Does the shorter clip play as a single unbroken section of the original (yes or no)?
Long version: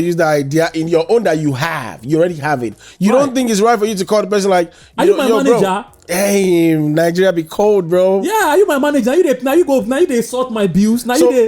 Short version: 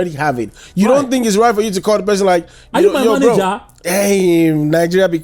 yes